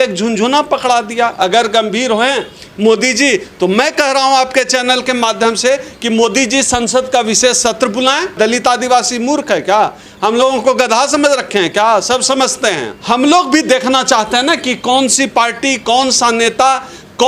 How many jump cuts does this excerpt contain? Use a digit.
2